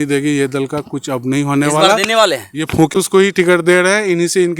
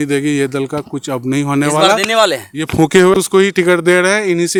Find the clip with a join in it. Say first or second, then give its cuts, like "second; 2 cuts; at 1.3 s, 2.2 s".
first; 1 cut; at 2.9 s